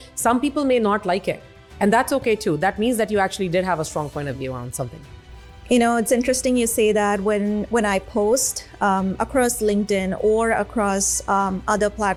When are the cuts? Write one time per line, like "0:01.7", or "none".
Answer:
none